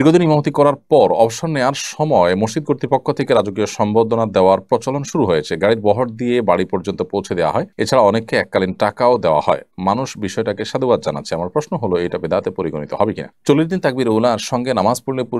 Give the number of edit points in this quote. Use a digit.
2